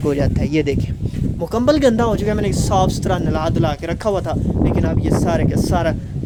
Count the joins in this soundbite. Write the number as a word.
zero